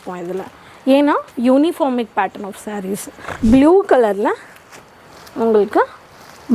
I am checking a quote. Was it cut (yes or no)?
yes